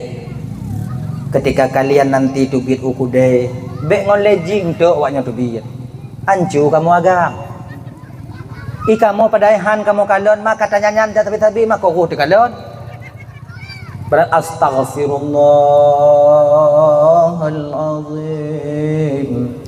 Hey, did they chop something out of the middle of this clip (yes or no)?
yes